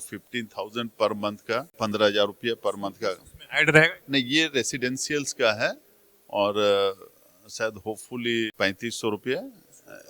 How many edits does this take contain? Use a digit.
3